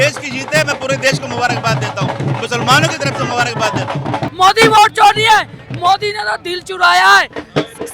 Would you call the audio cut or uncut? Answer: cut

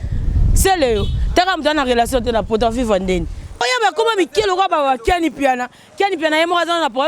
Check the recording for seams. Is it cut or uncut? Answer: cut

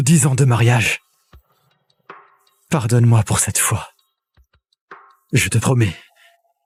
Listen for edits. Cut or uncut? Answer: uncut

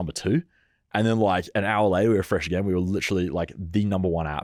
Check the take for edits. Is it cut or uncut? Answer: uncut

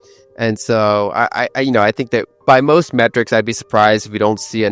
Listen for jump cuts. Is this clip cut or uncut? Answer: cut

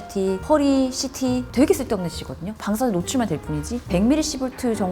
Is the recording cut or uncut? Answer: cut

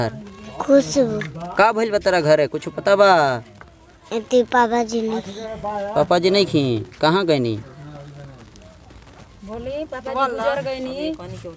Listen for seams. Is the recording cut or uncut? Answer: uncut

